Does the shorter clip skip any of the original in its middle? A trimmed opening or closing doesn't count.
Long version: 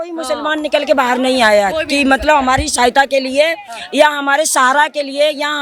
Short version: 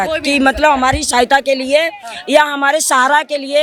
no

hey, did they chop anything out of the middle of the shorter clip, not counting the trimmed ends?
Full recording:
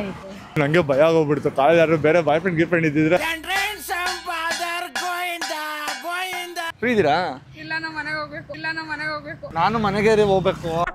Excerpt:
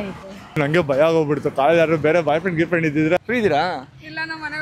yes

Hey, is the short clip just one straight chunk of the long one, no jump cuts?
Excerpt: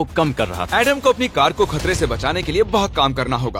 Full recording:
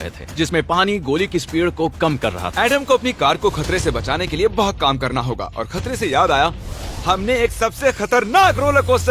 yes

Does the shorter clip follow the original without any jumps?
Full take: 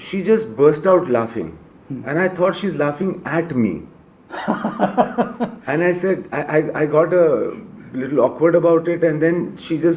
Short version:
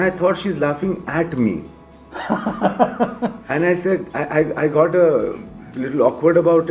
yes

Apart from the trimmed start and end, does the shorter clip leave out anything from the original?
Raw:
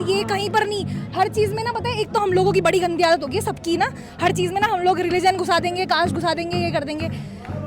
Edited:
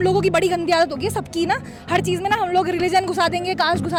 no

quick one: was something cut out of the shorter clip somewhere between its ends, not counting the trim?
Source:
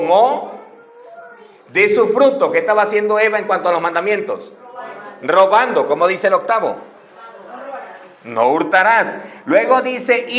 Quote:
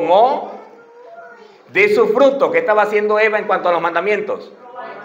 no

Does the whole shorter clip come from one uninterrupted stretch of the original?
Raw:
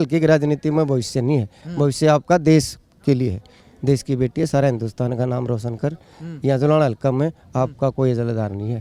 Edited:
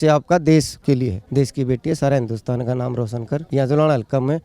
no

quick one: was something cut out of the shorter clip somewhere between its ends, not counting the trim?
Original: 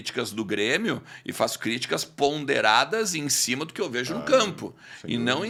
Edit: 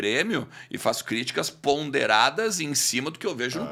no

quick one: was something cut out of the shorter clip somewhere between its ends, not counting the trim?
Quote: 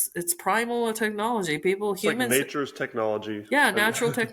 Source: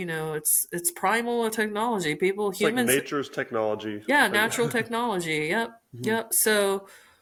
no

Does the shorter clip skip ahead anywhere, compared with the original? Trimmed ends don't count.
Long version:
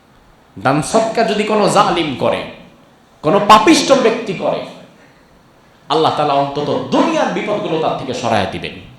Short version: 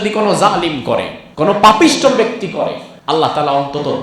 yes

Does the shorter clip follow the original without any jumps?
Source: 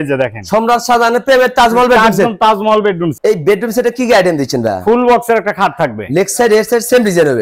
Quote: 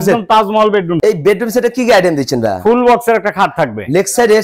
no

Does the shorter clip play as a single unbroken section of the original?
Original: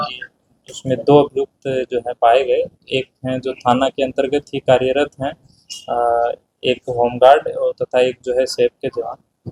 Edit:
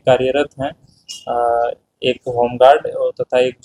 yes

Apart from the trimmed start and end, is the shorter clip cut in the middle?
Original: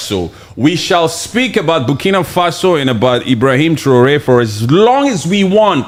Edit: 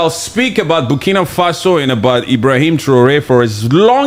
no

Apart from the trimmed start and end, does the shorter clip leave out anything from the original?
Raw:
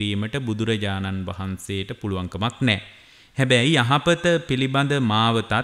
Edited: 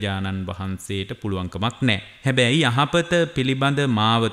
yes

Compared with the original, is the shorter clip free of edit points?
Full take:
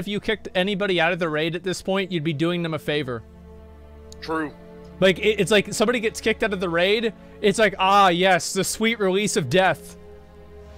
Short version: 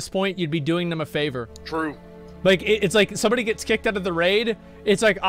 no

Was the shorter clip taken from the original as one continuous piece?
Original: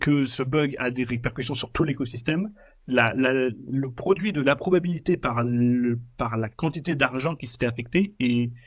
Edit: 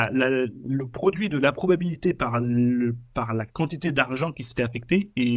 yes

